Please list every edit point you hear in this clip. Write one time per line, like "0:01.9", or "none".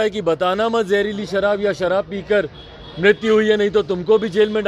none